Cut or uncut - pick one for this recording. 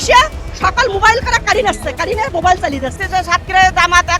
cut